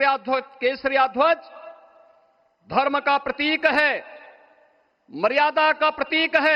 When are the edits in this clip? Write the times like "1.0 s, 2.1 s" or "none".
none